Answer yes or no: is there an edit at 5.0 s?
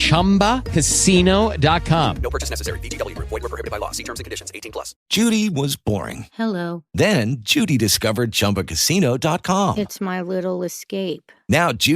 yes